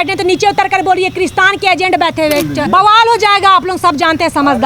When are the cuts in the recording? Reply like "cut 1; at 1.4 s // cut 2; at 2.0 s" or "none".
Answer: cut 1; at 2.6 s